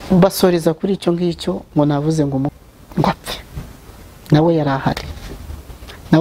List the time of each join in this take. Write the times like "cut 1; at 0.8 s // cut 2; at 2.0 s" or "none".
cut 1; at 2.5 s